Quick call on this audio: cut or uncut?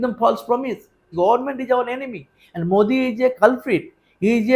cut